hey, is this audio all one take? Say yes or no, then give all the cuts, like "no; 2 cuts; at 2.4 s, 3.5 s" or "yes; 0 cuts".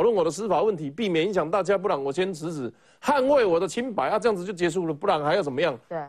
yes; 0 cuts